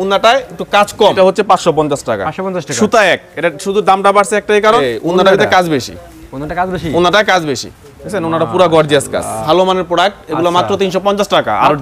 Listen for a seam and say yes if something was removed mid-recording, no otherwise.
yes